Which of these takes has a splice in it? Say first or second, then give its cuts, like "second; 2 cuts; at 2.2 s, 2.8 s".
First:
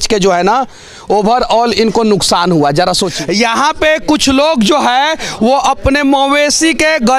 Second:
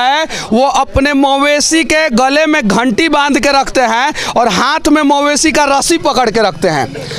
first; 1 cut; at 3.1 s